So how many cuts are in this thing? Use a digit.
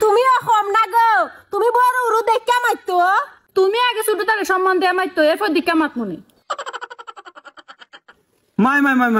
0